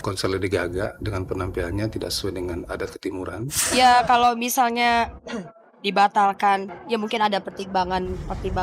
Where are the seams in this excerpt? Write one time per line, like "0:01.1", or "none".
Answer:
0:03.6
0:06.7